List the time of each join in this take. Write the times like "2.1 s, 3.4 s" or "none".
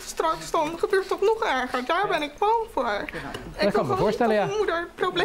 none